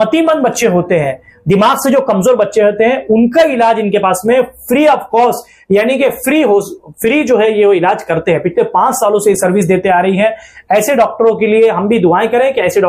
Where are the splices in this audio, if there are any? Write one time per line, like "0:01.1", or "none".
none